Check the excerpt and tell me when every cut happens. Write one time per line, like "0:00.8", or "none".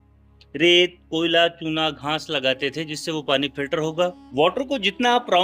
0:04.2